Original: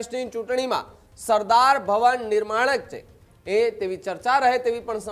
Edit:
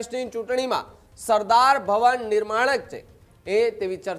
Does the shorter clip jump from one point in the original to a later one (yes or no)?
no